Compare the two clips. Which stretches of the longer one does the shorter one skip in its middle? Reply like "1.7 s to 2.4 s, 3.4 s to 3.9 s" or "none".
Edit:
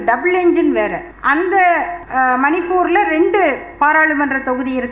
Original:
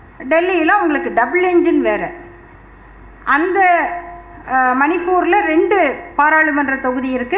2.2 s to 3.1 s, 4.0 s to 4.3 s

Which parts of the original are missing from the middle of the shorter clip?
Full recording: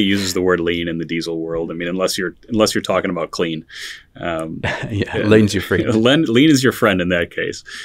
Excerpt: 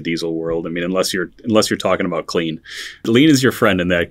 4.1 s to 6.3 s

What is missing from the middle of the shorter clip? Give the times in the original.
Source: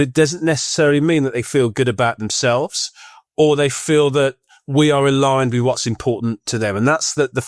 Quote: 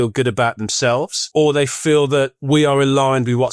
2.8 s to 3.2 s, 4.4 s to 4.6 s

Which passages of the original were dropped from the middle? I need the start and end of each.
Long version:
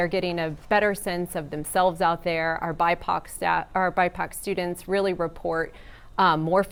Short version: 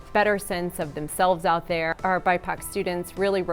2.5 s to 3.7 s

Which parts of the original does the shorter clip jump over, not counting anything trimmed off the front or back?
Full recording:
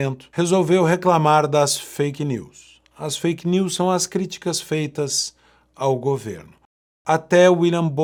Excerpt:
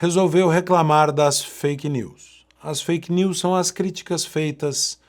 none

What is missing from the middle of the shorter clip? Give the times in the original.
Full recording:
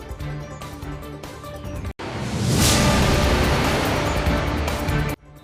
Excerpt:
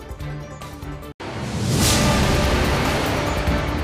1.1 s to 1.9 s

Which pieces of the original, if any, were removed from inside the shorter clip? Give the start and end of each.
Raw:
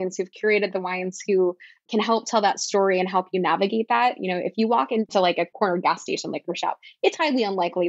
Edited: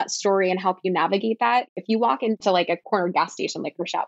4.2 s to 4.4 s

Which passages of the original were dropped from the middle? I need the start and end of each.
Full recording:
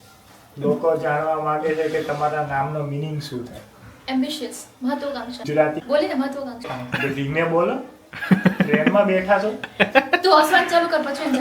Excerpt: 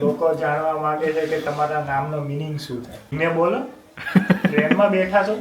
3.7 s to 7.3 s

